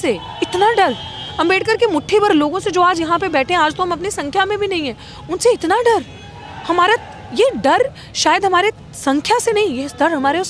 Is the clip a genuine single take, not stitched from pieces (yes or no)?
yes